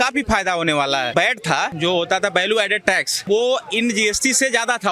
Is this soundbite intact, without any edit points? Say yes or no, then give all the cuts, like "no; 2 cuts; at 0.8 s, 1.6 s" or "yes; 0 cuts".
no; 2 cuts; at 1.4 s, 3.2 s